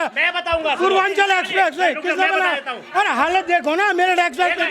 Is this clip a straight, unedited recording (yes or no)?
yes